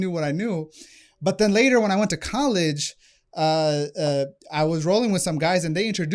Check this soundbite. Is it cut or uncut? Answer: uncut